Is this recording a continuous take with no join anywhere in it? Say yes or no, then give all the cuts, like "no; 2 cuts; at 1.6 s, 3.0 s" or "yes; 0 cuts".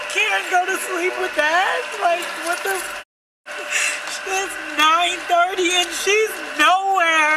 yes; 0 cuts